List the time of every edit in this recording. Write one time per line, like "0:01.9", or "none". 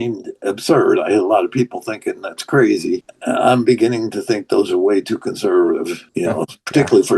0:03.1
0:06.0